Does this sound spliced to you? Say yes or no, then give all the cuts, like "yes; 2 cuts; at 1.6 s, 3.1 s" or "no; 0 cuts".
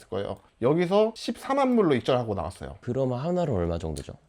yes; 1 cut; at 2.7 s